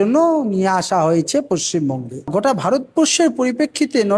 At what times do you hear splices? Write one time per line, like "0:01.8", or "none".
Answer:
0:02.3